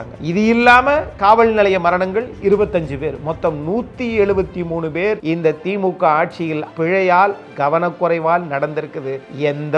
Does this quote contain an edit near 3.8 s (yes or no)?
no